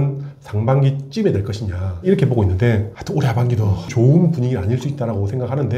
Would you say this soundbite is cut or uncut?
uncut